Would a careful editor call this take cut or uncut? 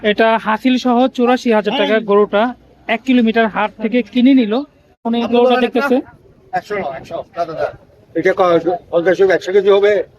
cut